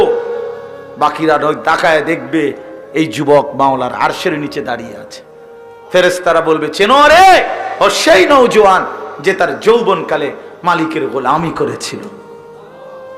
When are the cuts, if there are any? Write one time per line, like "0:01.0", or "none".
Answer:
0:12.3